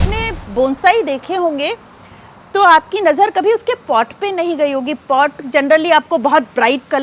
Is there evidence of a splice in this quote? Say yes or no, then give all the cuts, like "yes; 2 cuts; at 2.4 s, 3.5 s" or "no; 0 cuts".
no; 0 cuts